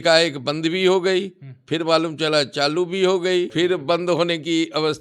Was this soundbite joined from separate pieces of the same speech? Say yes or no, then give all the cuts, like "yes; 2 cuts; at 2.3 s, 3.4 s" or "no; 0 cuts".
yes; 1 cut; at 3.5 s